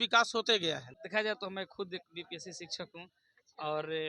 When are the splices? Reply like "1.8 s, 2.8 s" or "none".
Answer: 0.9 s